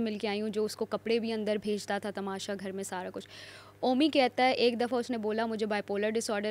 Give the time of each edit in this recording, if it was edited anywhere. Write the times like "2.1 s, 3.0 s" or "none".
none